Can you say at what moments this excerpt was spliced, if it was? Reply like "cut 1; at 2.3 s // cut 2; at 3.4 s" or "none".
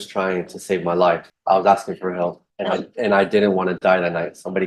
cut 1; at 1.3 s // cut 2; at 2.5 s

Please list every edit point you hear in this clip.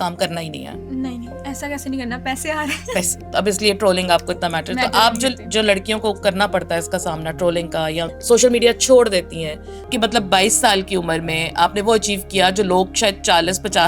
cut 1; at 3.2 s // cut 2; at 8.1 s // cut 3; at 9.8 s

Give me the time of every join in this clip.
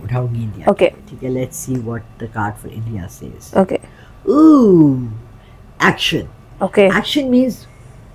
none

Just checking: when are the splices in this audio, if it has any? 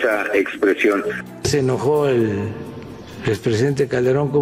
cut 1; at 1.2 s

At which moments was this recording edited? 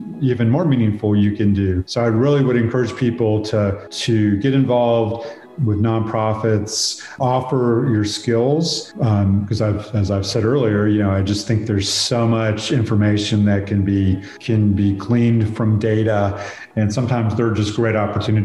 cut 1; at 7.2 s // cut 2; at 14.4 s // cut 3; at 16.6 s

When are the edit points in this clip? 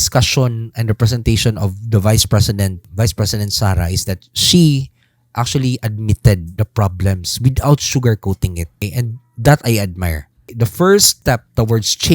cut 1; at 2.9 s // cut 2; at 6.5 s // cut 3; at 8.8 s // cut 4; at 10.5 s // cut 5; at 11.1 s

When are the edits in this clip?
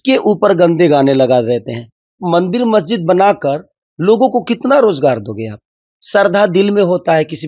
cut 1; at 2.2 s

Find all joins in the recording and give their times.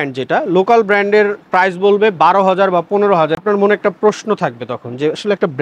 cut 1; at 3.4 s

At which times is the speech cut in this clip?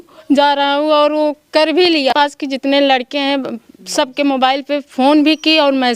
cut 1; at 2.1 s

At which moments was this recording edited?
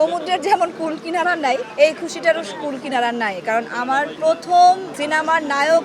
cut 1; at 1.7 s // cut 2; at 4.1 s // cut 3; at 4.9 s

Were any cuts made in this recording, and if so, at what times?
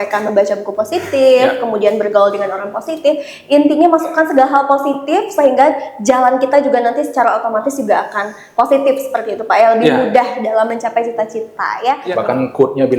cut 1; at 12.0 s

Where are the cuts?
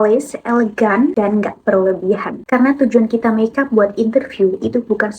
cut 1; at 1.1 s // cut 2; at 2.3 s

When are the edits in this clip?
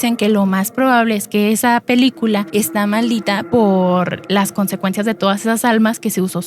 cut 1; at 2.5 s // cut 2; at 3.4 s

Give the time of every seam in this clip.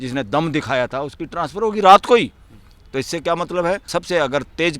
cut 1; at 3.9 s

